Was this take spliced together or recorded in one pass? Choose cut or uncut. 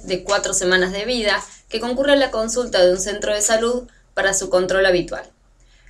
cut